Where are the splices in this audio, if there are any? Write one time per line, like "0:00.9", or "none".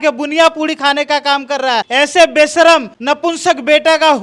0:01.9
0:02.9